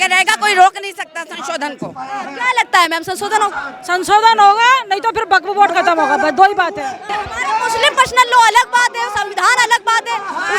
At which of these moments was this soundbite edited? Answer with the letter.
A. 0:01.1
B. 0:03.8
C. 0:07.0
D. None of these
C